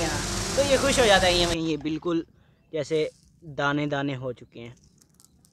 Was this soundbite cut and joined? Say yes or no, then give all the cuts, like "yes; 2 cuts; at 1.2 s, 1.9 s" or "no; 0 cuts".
yes; 1 cut; at 1.5 s